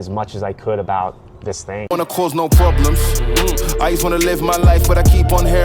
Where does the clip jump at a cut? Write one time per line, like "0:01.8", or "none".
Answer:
0:01.8